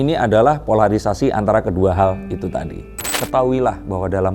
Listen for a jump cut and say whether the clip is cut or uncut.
cut